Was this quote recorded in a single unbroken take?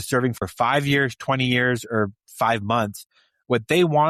yes; 0 cuts

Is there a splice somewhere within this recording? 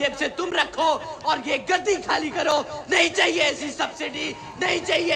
no; 0 cuts

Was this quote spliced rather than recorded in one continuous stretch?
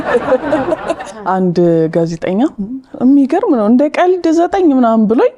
yes; 1 cut; at 1.0 s

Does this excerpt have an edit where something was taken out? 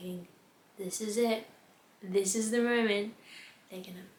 no; 0 cuts

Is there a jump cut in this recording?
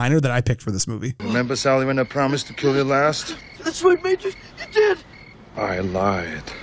no; 0 cuts

